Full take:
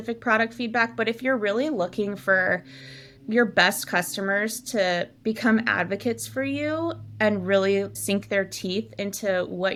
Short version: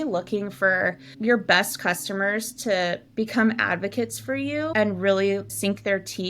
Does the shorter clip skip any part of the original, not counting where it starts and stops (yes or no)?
yes